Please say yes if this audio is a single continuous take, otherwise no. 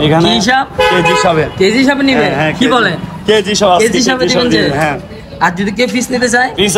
yes